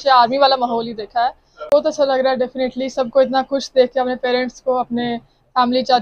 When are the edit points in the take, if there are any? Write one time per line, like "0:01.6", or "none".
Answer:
0:01.6